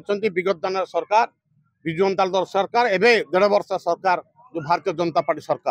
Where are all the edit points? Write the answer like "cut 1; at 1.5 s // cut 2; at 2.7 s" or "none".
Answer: none